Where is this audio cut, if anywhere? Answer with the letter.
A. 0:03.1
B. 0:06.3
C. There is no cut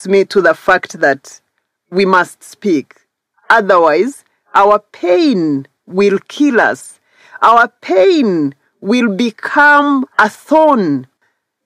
C